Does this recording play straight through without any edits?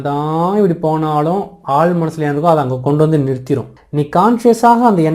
no; 1 cut; at 3.8 s

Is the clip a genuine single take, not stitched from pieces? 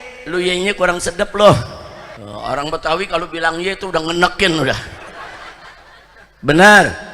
no; 1 cut; at 2.0 s

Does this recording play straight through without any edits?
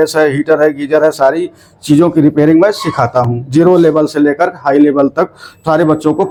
yes; 0 cuts

